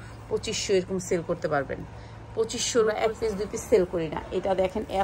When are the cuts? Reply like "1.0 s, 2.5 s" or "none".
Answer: 3.0 s